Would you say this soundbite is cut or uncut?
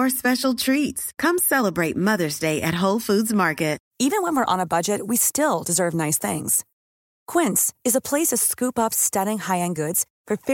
cut